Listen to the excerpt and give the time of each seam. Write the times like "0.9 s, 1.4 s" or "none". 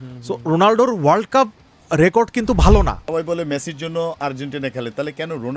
3.0 s

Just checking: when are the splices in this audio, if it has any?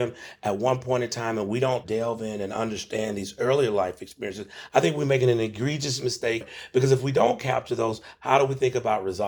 1.8 s, 4.5 s, 6.5 s, 8.0 s

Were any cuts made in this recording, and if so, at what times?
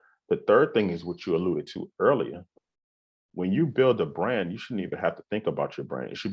none

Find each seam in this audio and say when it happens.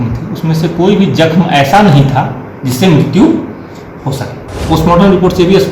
4.7 s

